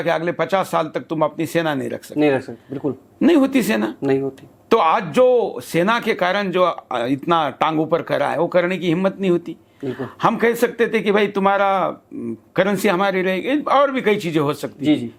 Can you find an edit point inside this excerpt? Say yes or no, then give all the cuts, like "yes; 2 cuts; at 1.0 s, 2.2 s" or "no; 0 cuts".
no; 0 cuts